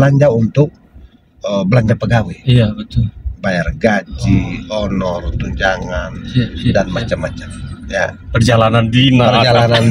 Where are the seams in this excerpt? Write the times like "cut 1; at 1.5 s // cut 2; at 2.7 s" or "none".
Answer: none